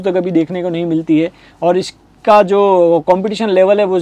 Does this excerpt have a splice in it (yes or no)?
no